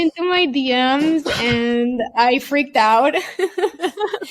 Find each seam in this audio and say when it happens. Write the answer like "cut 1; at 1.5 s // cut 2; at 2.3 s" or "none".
none